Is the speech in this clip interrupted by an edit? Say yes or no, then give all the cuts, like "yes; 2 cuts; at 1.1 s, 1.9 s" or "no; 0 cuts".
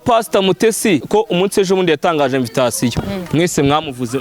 yes; 1 cut; at 1.1 s